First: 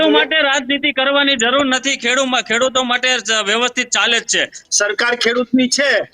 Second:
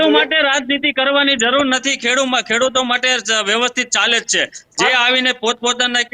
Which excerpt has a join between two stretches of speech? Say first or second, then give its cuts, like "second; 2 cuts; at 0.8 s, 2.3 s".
first; 1 cut; at 4.6 s